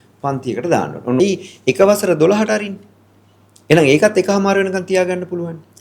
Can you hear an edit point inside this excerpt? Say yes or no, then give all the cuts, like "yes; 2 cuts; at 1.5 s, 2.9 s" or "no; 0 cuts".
yes; 1 cut; at 1.2 s